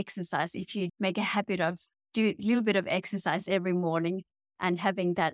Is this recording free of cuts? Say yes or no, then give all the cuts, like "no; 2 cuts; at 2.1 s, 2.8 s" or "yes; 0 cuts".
no; 1 cut; at 0.9 s